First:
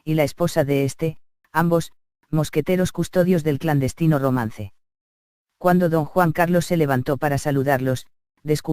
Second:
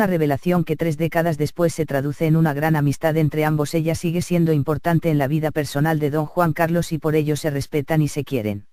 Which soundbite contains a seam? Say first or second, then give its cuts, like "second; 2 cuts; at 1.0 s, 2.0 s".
first; 1 cut; at 7.3 s